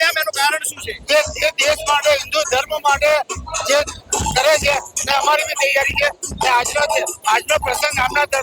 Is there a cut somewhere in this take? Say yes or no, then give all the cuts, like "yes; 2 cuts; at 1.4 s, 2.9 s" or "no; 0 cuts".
no; 0 cuts